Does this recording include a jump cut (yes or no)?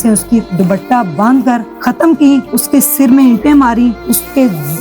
yes